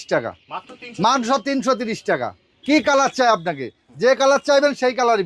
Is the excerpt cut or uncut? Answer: uncut